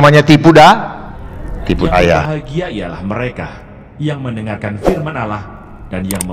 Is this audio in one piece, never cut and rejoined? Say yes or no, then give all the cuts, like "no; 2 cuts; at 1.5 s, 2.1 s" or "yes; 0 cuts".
no; 1 cut; at 2.2 s